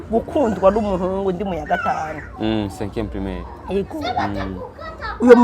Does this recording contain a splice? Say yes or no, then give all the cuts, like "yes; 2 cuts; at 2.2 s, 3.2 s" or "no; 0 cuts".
no; 0 cuts